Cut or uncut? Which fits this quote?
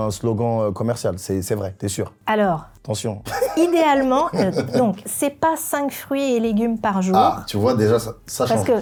uncut